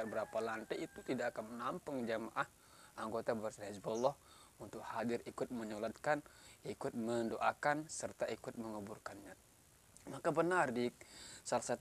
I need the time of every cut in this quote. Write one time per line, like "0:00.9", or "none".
none